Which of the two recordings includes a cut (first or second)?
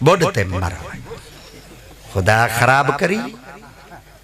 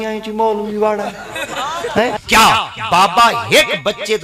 second